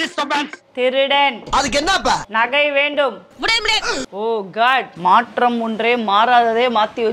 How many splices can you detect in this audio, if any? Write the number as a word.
one